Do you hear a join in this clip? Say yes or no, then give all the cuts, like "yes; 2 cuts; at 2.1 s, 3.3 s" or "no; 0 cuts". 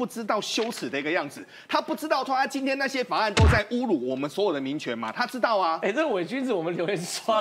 no; 0 cuts